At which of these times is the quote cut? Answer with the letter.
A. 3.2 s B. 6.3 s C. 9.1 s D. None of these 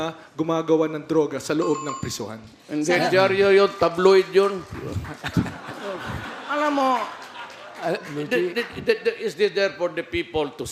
D